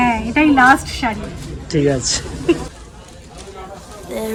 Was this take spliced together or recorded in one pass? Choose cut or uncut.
uncut